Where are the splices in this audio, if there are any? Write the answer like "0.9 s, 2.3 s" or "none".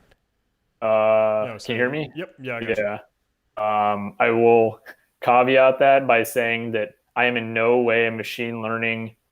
none